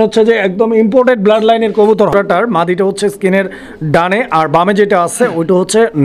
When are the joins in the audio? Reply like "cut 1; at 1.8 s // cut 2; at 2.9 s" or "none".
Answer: cut 1; at 2.6 s